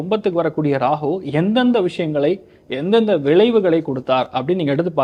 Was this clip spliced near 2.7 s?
no; 0 cuts

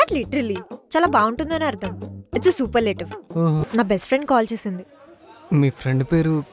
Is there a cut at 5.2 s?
no; 1 cut; at 3.7 s

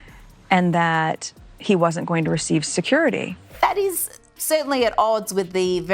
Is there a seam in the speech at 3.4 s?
yes; 1 cut; at 3.4 s

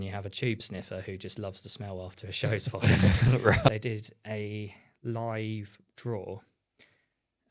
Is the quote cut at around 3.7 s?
yes; 1 cut; at 3.7 s

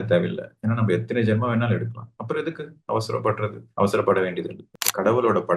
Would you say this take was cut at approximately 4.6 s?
yes; 1 cut; at 4.6 s

